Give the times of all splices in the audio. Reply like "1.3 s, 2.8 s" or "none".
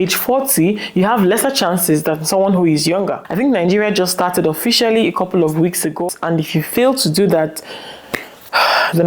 3.2 s, 6.1 s